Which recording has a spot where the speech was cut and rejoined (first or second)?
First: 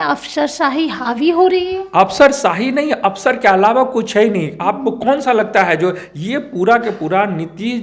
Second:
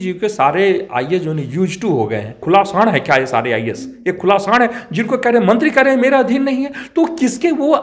second